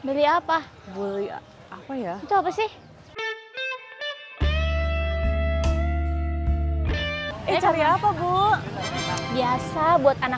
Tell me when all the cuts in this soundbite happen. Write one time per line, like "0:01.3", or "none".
0:07.3